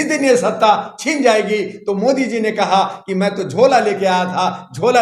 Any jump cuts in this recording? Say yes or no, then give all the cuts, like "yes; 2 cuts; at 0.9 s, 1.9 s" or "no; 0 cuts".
no; 0 cuts